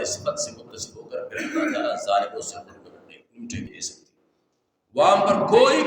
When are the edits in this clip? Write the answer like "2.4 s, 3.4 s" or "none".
3.7 s